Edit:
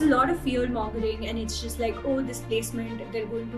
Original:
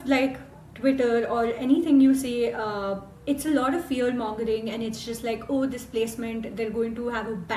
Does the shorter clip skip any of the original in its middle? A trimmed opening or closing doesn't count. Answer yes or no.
no